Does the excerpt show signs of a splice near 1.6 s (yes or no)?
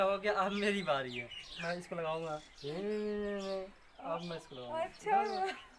yes